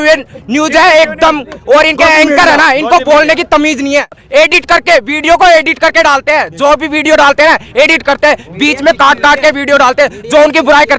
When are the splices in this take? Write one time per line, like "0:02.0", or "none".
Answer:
0:04.2